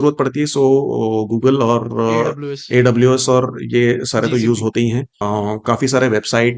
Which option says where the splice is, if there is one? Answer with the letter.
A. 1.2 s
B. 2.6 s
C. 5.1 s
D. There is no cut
C